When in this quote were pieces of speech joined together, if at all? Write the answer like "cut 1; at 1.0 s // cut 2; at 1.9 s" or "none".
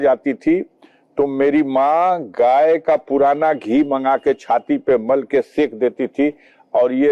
none